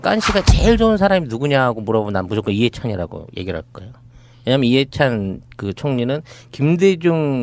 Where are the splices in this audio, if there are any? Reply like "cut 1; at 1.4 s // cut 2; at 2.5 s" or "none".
cut 1; at 2.1 s